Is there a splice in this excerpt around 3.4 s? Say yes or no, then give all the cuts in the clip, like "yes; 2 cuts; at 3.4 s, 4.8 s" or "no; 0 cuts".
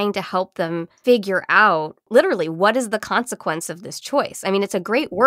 no; 2 cuts; at 0.9 s, 2.0 s